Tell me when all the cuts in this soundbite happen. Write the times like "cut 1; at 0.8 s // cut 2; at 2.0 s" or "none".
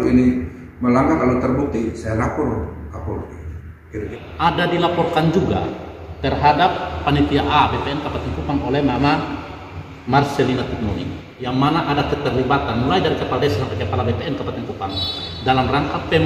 cut 1; at 4.1 s